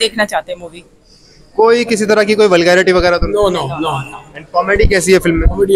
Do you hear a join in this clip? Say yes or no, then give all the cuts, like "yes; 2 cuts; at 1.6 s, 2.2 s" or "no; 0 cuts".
no; 0 cuts